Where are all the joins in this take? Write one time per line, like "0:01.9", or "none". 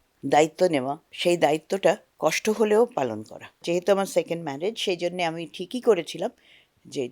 0:01.1
0:03.6